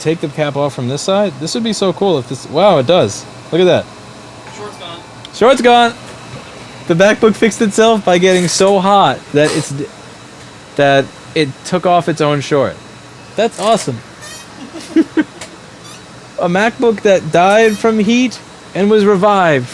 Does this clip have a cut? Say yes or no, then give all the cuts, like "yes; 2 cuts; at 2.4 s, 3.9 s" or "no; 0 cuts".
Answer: no; 0 cuts